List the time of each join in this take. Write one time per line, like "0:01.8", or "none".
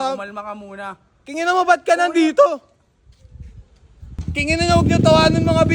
0:04.1